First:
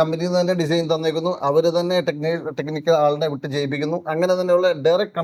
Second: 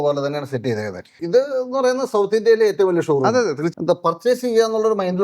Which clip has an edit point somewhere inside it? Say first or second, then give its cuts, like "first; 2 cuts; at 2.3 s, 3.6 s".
second; 2 cuts; at 1.2 s, 3.6 s